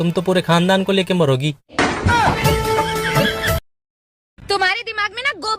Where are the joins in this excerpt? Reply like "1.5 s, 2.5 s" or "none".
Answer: 3.7 s